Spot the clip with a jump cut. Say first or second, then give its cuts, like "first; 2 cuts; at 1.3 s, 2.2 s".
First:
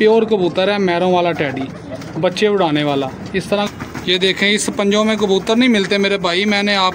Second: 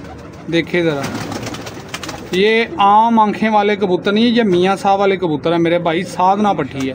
first; 1 cut; at 3.7 s